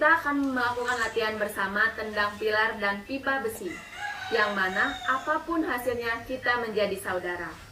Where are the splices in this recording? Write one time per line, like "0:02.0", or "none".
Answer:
none

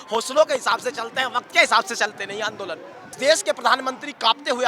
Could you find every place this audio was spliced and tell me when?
0:03.1

